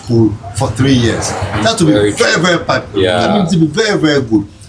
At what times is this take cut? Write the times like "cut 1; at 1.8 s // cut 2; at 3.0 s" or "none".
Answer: none